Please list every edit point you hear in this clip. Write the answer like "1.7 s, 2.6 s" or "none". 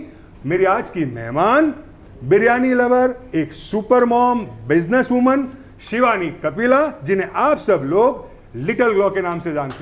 none